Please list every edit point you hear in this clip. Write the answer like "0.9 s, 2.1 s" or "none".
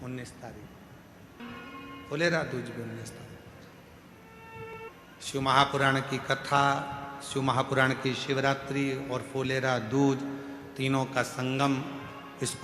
1.4 s, 4.7 s